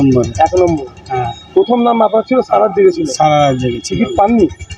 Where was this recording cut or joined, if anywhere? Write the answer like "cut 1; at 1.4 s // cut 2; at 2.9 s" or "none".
none